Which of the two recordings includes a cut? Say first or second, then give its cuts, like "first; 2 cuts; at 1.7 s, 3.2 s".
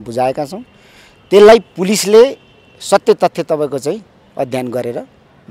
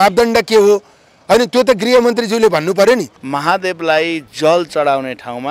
second; 1 cut; at 3.2 s